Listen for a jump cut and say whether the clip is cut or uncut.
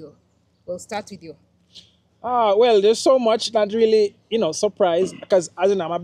uncut